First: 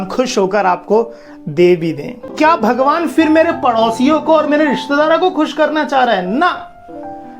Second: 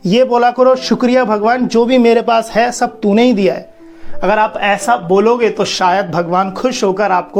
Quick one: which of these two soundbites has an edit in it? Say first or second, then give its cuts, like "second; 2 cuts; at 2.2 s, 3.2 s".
first; 1 cut; at 2.3 s